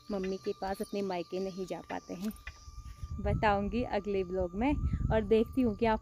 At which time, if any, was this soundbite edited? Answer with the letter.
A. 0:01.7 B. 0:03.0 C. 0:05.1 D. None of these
B